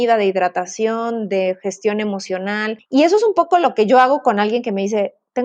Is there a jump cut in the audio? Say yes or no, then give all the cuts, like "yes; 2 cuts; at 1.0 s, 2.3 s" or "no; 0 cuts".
yes; 1 cut; at 2.8 s